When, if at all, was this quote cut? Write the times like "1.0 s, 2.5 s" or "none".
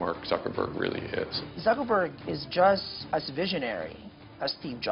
1.4 s, 2.9 s